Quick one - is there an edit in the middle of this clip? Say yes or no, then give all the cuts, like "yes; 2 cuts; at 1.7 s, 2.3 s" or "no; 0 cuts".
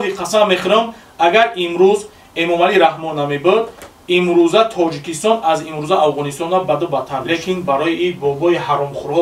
yes; 1 cut; at 7.2 s